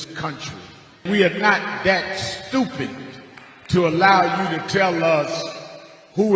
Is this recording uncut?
no; 1 cut; at 1.0 s

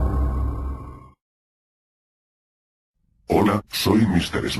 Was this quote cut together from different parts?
no; 0 cuts

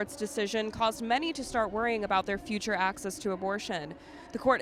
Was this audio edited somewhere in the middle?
no; 0 cuts

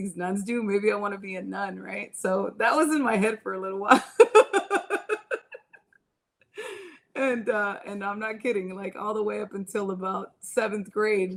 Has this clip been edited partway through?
no; 0 cuts

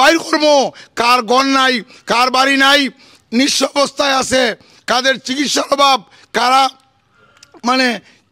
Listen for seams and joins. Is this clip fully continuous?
no; 1 cut; at 3.1 s

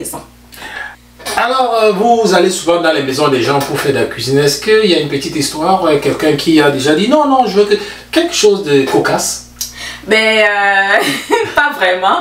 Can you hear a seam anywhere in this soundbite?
yes; 1 cut; at 0.9 s

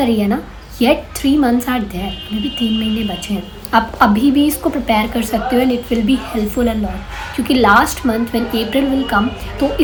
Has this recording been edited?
no; 0 cuts

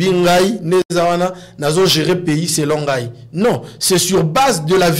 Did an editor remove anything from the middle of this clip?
no; 0 cuts

